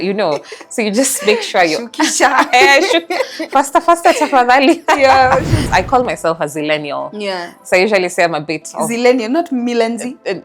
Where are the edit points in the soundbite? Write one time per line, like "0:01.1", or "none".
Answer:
0:05.7